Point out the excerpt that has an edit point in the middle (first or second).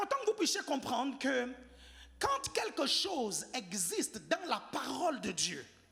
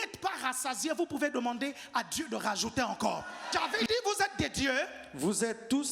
second